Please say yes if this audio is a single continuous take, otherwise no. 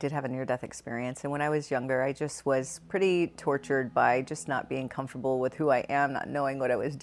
yes